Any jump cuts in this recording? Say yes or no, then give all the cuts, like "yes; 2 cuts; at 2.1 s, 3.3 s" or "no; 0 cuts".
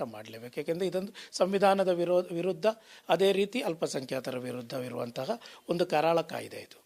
no; 0 cuts